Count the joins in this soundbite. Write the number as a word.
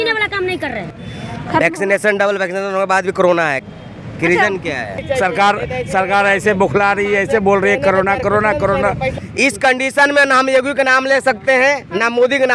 three